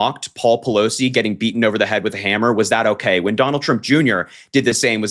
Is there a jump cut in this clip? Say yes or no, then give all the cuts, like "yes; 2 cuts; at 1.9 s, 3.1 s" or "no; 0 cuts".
no; 0 cuts